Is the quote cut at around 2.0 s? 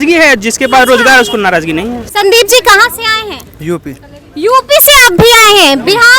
yes; 1 cut; at 2.0 s

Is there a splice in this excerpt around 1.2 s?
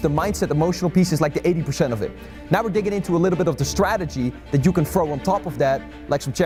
no; 0 cuts

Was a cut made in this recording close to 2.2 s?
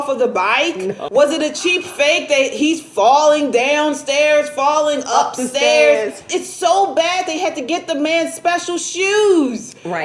no; 2 cuts; at 1.0 s, 6.3 s

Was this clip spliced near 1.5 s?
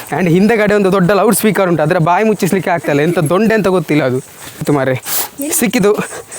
no; 1 cut; at 4.6 s

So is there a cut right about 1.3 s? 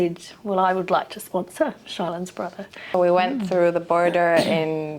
no; 1 cut; at 2.9 s

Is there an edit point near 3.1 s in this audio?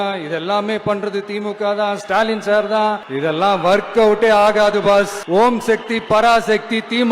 yes; 2 cuts; at 3.1 s, 5.2 s

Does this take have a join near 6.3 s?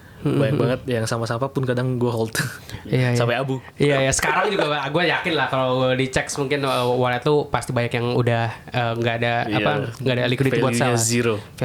no; 0 cuts

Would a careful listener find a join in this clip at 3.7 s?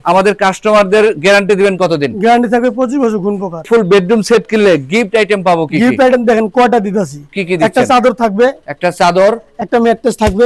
yes; 1 cut; at 3.7 s

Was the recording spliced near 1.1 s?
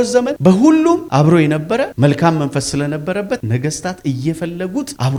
no; 0 cuts

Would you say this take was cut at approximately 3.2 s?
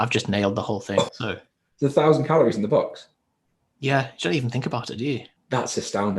no; 2 cuts; at 1.1 s, 5.3 s

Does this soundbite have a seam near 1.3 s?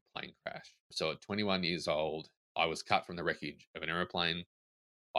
no; 1 cut; at 2.6 s

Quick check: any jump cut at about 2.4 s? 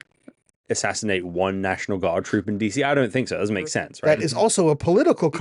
no; 1 cut; at 3.9 s

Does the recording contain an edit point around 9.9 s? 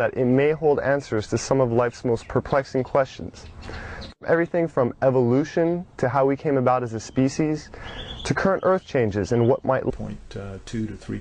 no; 0 cuts

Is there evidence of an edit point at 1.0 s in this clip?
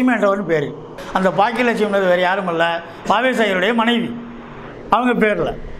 yes; 1 cut; at 1.0 s

